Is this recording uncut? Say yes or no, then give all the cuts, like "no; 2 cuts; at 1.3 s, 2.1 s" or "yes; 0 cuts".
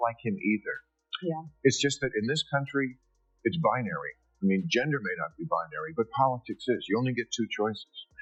yes; 0 cuts